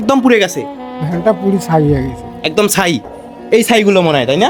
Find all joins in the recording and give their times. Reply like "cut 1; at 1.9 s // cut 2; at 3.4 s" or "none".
none